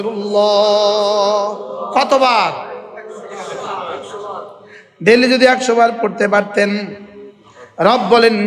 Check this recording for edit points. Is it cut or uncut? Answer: uncut